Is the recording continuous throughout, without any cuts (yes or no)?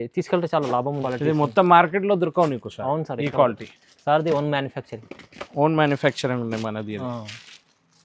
no